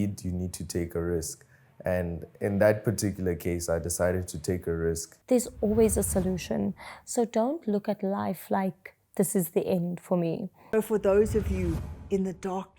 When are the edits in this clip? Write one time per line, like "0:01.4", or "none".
0:05.1
0:10.7